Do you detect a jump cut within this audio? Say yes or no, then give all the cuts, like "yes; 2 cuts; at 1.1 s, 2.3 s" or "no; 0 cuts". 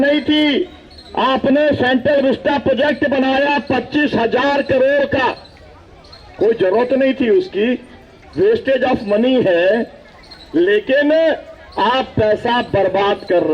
no; 0 cuts